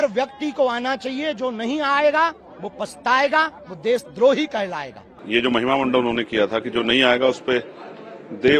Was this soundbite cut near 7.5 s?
no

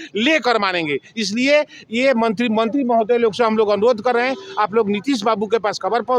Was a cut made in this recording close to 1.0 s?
no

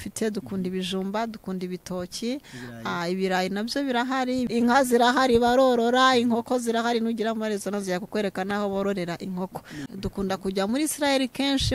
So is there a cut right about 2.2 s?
no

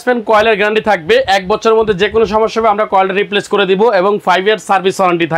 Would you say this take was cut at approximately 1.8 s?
no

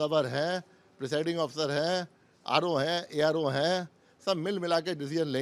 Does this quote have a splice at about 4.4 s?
no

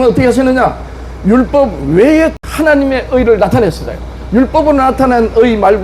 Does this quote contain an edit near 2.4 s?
yes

